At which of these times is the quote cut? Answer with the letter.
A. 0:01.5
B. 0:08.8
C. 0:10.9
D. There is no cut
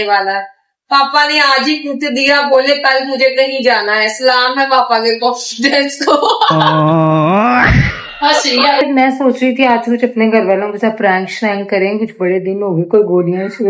B